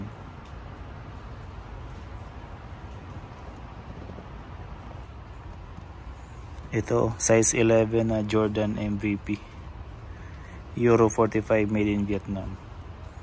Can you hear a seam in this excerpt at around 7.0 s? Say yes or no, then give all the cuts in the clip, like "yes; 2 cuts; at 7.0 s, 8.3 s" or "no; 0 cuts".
no; 1 cut; at 5.0 s